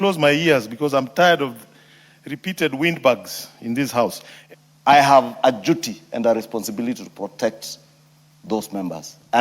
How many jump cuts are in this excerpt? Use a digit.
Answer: 1